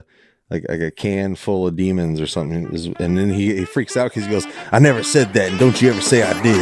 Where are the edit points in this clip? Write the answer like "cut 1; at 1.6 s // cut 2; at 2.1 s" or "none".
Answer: none